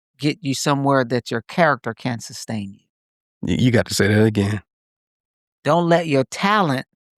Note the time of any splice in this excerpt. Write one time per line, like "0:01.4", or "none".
none